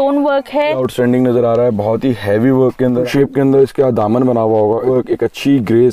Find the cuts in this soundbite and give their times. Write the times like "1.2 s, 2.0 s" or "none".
0.8 s, 3.1 s, 4.8 s